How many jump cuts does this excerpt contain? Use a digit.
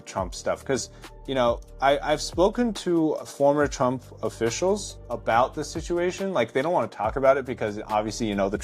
3